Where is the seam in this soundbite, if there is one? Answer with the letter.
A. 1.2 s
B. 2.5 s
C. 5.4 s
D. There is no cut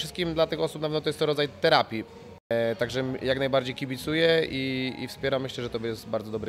B